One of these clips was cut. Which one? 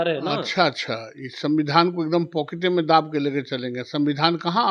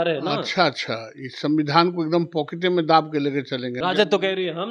second; 1 cut; at 3.8 s

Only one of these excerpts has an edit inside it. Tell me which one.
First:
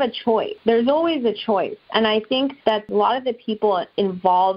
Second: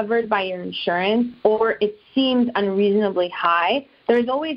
first; 1 cut; at 2.9 s

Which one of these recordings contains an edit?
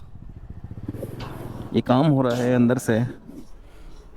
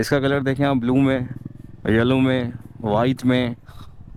first; 1 cut; at 1.7 s

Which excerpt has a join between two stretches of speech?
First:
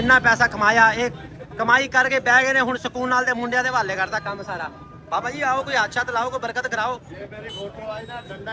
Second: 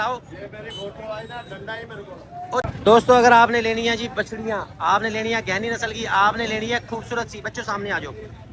second; 1 cut; at 2.6 s

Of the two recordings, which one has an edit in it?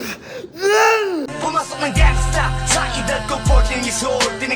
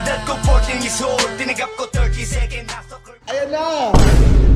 first; 1 cut; at 1.3 s

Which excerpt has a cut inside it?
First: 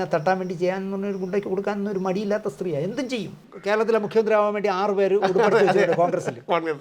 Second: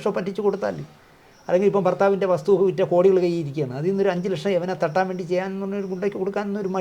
first; 1 cut; at 3.5 s

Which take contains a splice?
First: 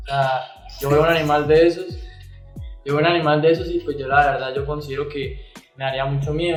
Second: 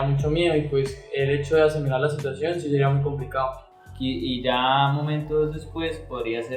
second; 1 cut; at 3.6 s

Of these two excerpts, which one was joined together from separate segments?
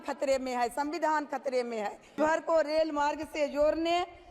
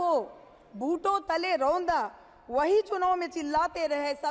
first; 1 cut; at 2.2 s

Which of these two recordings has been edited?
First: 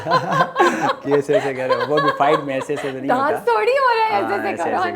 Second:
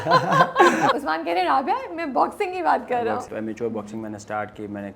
second; 2 cuts; at 1.0 s, 3.3 s

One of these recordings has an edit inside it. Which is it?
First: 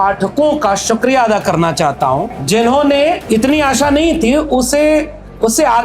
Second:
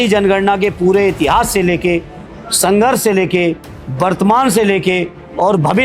first; 2 cuts; at 2.4 s, 3.2 s

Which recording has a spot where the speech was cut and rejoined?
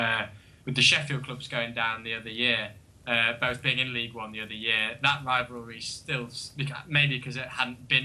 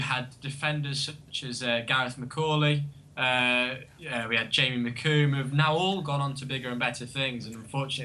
first; 1 cut; at 3.6 s

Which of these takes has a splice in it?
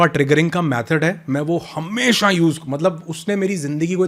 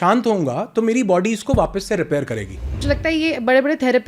second; 1 cut; at 2.8 s

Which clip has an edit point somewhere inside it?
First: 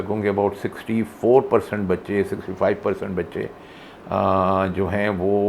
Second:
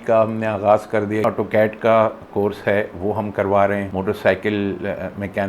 second; 2 cuts; at 1.2 s, 3.9 s

